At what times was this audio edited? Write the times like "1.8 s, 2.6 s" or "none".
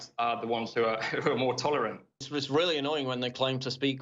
2.2 s